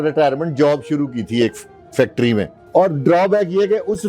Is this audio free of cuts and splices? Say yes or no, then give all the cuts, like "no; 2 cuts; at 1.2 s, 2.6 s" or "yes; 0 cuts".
no; 1 cut; at 2.6 s